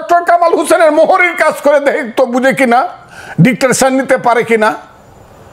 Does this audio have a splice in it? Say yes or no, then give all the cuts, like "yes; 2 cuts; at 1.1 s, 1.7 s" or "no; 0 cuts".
no; 0 cuts